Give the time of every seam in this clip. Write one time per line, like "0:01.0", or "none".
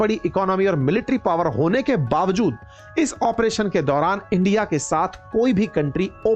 none